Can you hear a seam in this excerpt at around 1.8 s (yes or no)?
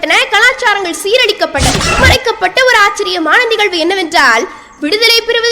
yes